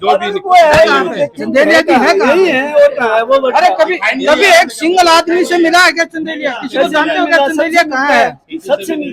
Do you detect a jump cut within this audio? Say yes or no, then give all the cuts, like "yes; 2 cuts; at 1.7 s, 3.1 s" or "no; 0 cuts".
no; 0 cuts